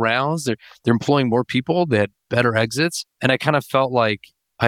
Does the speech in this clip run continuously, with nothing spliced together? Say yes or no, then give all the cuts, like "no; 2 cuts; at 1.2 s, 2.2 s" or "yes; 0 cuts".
no; 1 cut; at 3.1 s